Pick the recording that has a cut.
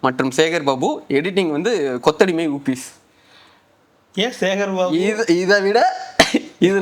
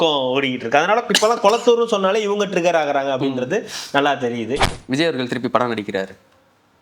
second; 1 cut; at 4.7 s

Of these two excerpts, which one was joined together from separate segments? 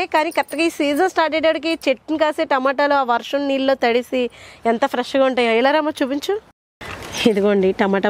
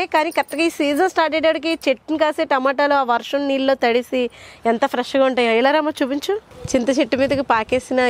second; 1 cut; at 6.5 s

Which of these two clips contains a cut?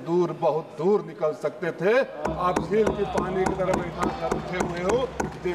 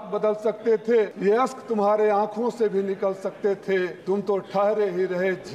second; 2 cuts; at 1.1 s, 4.0 s

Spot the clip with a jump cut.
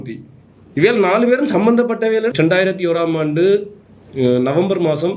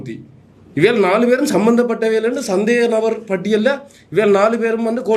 first; 1 cut; at 2.3 s

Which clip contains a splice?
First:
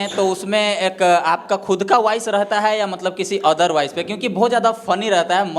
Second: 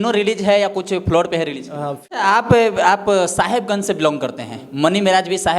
second; 1 cut; at 2.1 s

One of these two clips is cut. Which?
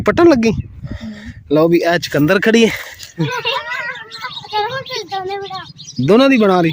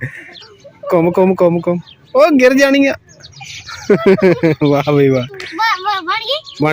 first; 1 cut; at 3.2 s

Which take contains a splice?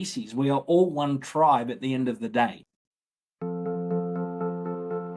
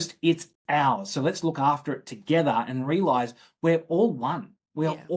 first; 1 cut; at 2.7 s

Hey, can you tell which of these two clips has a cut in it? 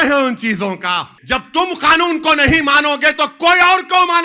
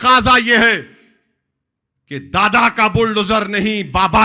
first; 1 cut; at 1.1 s

